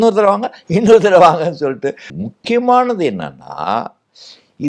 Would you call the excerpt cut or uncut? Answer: cut